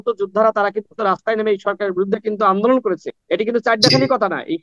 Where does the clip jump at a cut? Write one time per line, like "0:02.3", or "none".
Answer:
0:03.1